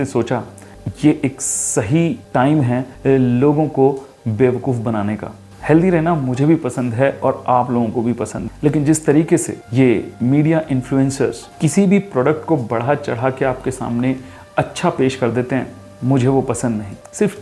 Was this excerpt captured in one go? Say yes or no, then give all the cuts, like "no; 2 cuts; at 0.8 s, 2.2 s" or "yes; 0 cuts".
yes; 0 cuts